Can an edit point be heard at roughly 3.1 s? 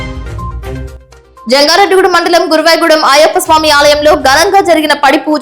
no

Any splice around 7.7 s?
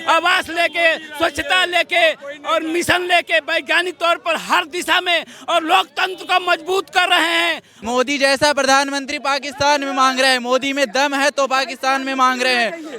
yes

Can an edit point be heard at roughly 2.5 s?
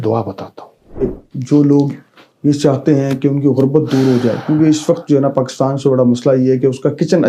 no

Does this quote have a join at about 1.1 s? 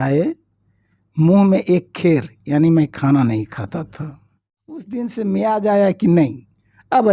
no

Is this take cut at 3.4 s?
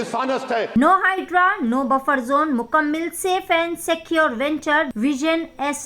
no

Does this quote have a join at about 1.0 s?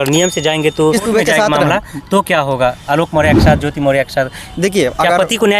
yes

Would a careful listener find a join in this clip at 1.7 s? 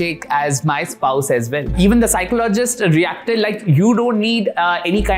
yes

